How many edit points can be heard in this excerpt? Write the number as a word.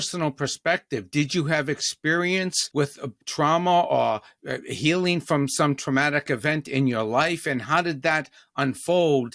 one